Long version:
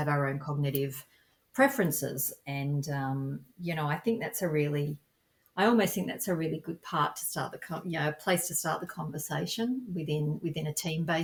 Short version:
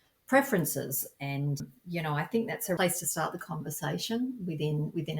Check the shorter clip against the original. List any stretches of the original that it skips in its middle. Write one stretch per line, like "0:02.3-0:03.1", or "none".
0:02.9-0:03.3
0:04.5-0:08.3